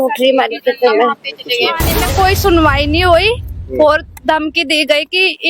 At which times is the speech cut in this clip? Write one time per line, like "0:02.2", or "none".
0:01.8